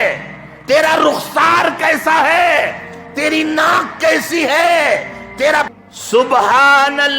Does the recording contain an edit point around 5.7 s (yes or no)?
yes